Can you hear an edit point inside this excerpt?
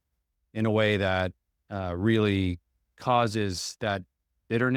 no; 0 cuts

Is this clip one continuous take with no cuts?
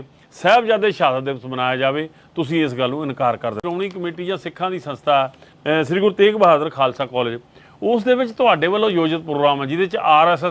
no; 1 cut; at 3.6 s

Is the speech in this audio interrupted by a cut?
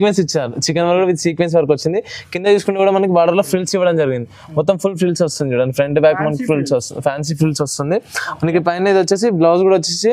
no; 0 cuts

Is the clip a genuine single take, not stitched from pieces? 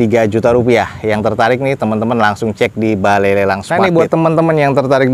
no; 1 cut; at 3.6 s

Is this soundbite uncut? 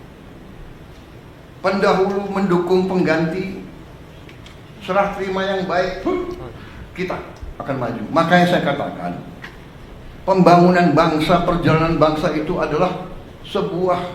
yes; 0 cuts

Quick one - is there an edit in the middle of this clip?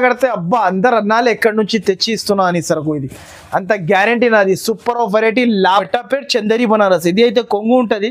yes; 1 cut; at 5.7 s

